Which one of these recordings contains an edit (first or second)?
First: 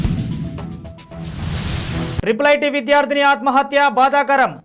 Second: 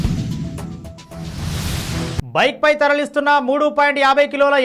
first